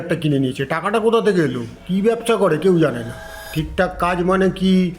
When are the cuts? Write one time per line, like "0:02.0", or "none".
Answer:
0:03.4